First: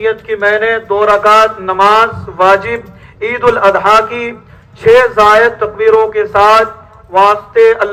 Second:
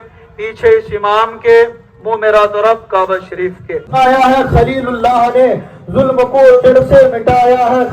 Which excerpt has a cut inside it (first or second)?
second